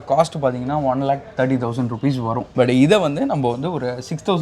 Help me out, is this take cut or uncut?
cut